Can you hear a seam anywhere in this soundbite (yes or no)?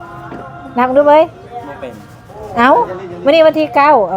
no